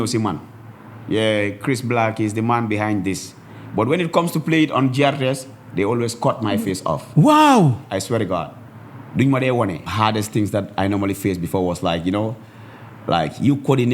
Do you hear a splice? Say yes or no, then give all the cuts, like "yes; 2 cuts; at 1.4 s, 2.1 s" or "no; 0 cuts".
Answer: yes; 1 cut; at 9.9 s